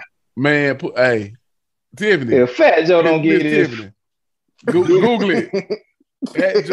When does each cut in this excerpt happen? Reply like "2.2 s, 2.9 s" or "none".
none